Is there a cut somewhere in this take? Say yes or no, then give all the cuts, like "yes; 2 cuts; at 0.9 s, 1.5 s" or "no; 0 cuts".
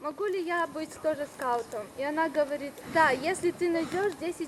no; 0 cuts